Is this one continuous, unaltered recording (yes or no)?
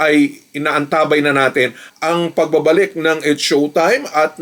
yes